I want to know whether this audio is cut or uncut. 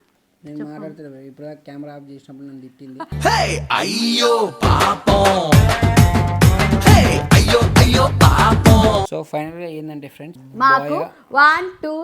cut